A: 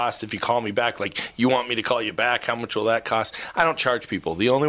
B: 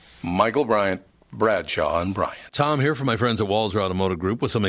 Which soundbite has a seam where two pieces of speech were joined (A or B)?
B